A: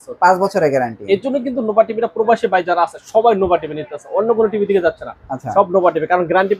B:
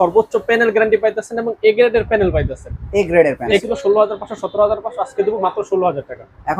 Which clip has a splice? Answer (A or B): B